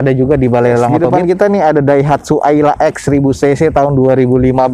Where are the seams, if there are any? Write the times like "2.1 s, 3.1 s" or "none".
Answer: 1.0 s

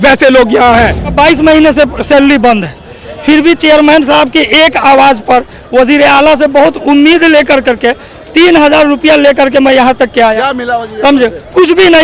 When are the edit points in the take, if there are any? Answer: 1.1 s

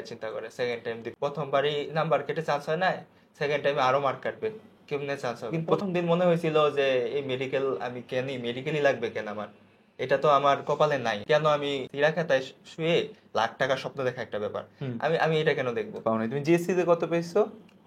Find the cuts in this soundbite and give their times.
1.0 s, 5.8 s, 11.2 s, 11.9 s, 16.0 s

